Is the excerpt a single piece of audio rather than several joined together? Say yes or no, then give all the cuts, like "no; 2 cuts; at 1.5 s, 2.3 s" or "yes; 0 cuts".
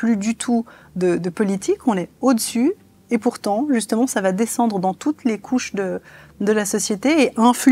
yes; 0 cuts